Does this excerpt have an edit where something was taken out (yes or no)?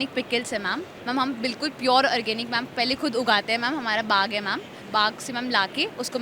yes